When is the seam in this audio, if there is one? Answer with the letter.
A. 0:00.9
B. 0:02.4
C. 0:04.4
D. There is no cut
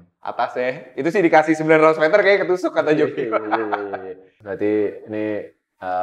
C